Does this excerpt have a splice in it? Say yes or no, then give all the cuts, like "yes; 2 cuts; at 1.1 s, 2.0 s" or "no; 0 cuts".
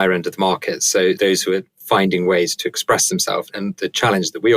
yes; 2 cuts; at 1.2 s, 3.5 s